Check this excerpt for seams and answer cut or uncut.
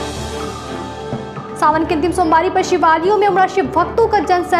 cut